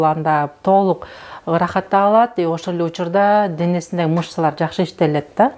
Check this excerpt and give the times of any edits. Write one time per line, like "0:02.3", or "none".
none